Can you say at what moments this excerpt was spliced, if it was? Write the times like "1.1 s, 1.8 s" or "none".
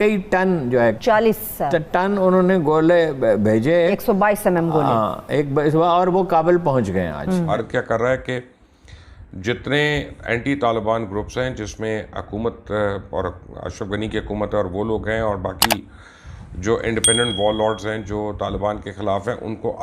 1.0 s, 7.5 s